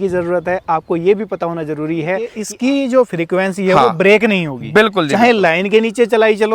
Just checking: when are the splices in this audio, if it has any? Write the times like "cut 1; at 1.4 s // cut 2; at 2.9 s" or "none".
cut 1; at 2.4 s

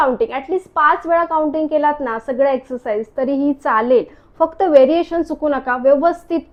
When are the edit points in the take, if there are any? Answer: none

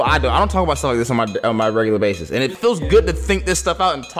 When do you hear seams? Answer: cut 1; at 2.4 s

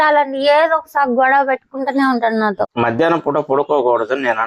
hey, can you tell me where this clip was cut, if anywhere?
cut 1; at 2.7 s

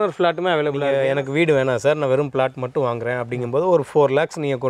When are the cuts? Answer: cut 1; at 0.9 s

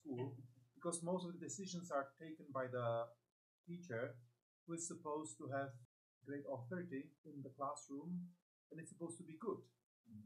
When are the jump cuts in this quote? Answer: cut 1; at 5.9 s // cut 2; at 7.2 s

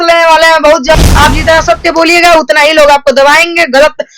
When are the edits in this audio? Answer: cut 1; at 0.9 s

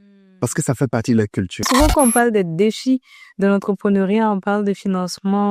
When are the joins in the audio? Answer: cut 1; at 1.7 s

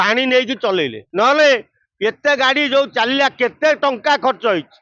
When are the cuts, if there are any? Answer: cut 1; at 1.0 s

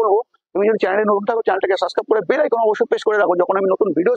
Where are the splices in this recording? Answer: none

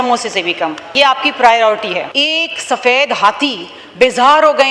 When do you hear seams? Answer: cut 1; at 0.8 s // cut 2; at 2.1 s

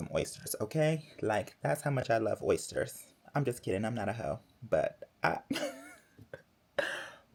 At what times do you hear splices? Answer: none

